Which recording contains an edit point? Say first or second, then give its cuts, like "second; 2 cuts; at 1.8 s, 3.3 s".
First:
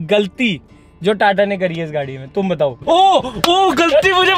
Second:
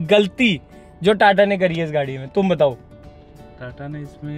first; 1 cut; at 2.8 s